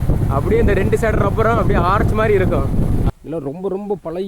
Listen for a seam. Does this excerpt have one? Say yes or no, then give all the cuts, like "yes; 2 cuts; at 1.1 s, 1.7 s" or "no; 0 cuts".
yes; 1 cut; at 3.1 s